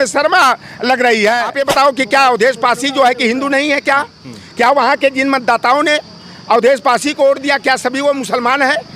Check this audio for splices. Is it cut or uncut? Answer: cut